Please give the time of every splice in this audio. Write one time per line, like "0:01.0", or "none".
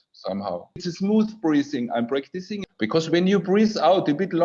0:00.9
0:02.6